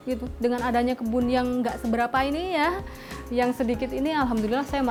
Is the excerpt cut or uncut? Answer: uncut